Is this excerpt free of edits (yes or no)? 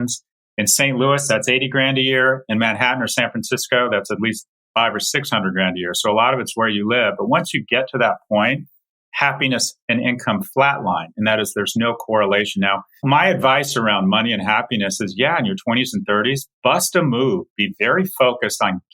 no